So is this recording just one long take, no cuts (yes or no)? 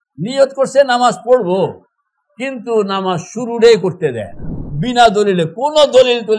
no